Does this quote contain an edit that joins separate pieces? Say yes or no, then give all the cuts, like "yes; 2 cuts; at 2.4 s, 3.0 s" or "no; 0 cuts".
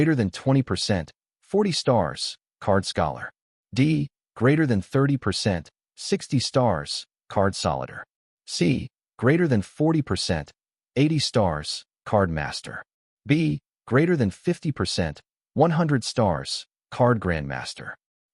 no; 0 cuts